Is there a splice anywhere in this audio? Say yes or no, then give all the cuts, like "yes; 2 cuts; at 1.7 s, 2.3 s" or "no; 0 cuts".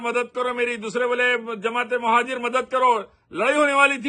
no; 0 cuts